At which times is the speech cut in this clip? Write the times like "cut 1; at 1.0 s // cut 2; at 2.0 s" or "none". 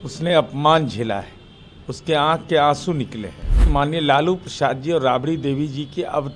cut 1; at 3.7 s